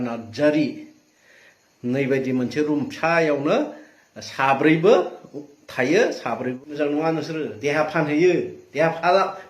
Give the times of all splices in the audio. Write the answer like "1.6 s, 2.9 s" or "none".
6.5 s